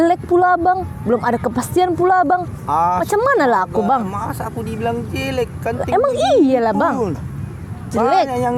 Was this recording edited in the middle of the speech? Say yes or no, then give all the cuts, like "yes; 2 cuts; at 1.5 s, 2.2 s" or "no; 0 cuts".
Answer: no; 0 cuts